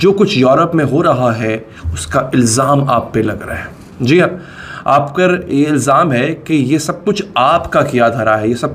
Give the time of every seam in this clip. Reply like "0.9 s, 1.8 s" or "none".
none